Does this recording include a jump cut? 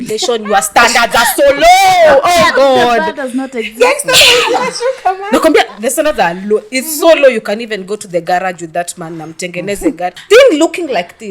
yes; 1 cut; at 10.2 s

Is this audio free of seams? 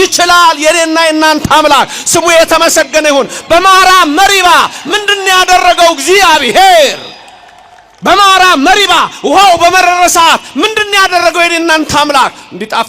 yes; 0 cuts

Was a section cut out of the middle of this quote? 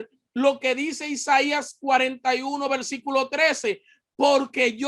no; 0 cuts

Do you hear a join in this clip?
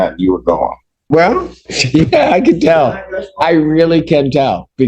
yes; 1 cut; at 1.0 s

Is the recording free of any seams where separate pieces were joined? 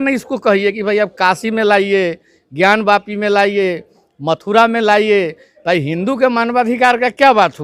yes; 0 cuts

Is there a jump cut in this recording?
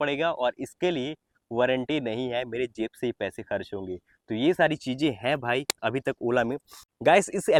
no; 0 cuts

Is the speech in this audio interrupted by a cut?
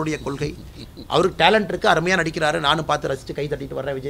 no; 0 cuts

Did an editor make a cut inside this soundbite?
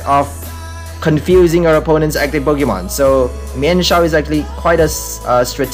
no; 0 cuts

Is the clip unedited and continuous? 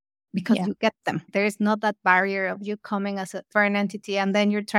no; 2 cuts; at 1.3 s, 3.5 s

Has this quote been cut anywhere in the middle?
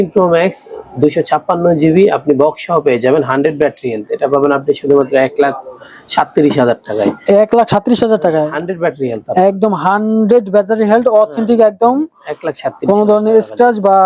no; 0 cuts

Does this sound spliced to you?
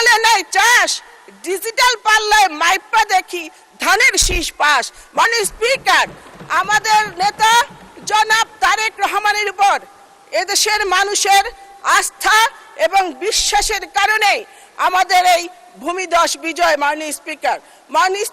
no; 0 cuts

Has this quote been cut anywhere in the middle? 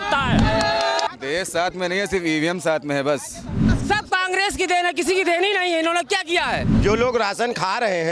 yes; 3 cuts; at 1.1 s, 3.7 s, 6.7 s

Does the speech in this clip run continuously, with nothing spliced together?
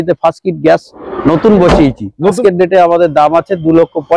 no; 1 cut; at 2.4 s

